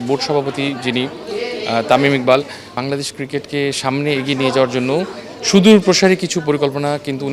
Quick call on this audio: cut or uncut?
cut